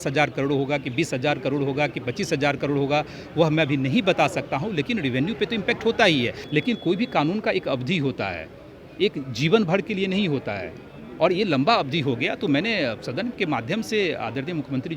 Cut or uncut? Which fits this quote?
cut